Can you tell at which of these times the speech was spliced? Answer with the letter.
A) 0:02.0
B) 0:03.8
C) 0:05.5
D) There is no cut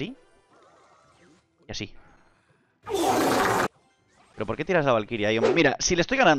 C